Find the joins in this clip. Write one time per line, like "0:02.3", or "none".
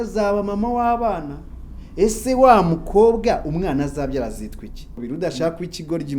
0:04.9